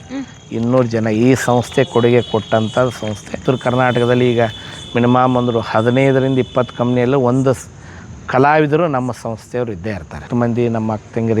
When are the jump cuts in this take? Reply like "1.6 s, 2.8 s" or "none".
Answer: 3.4 s, 10.3 s